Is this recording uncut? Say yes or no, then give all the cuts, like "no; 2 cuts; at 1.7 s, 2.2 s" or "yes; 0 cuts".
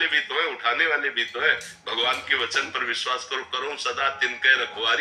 yes; 0 cuts